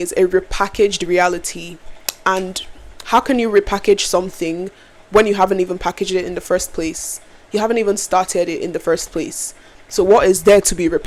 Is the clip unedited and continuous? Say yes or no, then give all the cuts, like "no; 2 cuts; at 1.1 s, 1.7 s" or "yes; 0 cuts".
yes; 0 cuts